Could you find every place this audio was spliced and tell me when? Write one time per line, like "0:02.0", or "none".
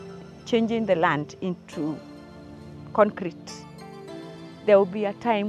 none